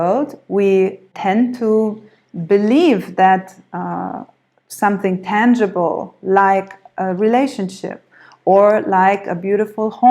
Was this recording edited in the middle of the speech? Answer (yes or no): yes